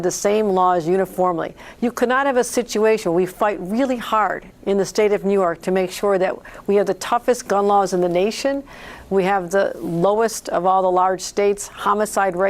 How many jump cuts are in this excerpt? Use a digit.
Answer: 0